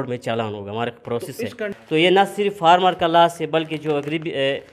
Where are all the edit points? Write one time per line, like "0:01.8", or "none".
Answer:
0:01.7